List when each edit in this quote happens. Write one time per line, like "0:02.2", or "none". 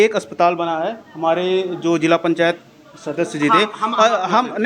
none

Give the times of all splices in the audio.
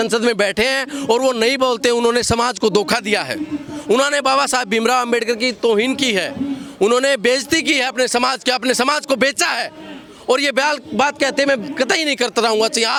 none

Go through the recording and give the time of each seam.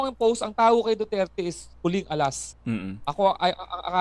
0:02.5

